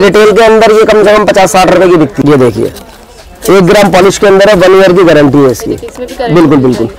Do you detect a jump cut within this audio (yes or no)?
yes